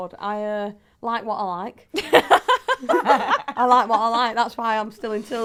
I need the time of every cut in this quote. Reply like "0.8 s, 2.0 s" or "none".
none